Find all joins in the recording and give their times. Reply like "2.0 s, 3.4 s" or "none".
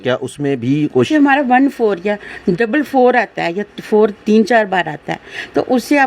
1.1 s